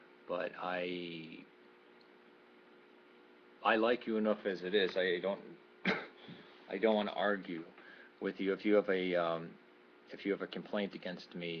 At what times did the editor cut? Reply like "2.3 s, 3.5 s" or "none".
none

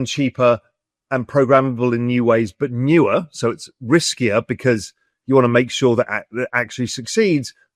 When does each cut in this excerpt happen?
none

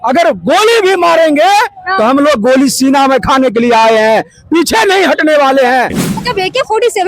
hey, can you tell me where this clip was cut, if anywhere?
6.0 s

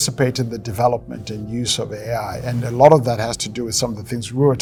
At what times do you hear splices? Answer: none

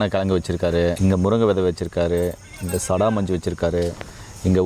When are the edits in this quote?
1.0 s

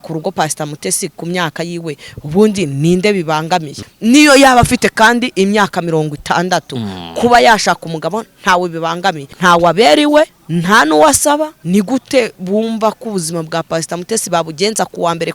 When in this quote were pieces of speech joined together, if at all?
3.8 s, 9.3 s, 10.4 s, 11.6 s

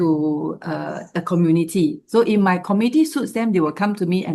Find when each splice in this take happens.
none

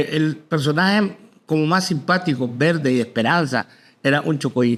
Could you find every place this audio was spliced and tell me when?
none

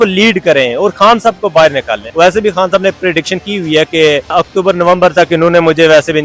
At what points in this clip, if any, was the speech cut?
2.0 s, 4.3 s

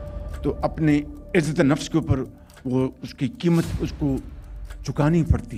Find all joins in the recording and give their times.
none

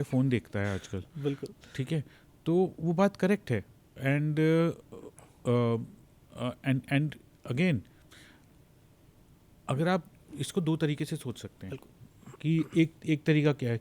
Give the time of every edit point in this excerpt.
none

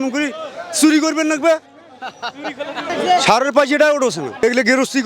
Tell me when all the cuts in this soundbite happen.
2.8 s

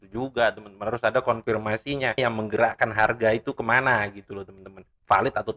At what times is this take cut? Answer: 2.2 s

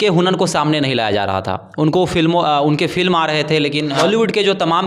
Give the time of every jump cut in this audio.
4.0 s

